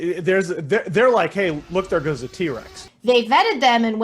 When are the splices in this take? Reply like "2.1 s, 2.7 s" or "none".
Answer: 2.8 s